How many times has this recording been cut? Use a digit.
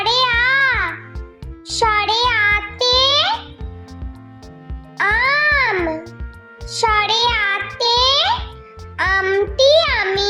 2